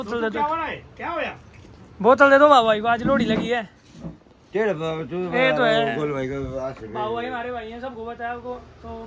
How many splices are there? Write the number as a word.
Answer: zero